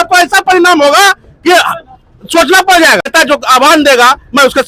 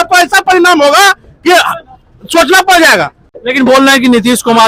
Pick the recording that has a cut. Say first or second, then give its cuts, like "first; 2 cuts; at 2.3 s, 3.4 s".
first; 1 cut; at 3.1 s